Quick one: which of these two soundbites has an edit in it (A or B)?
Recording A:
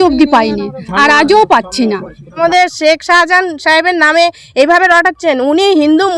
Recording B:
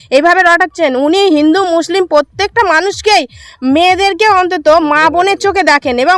A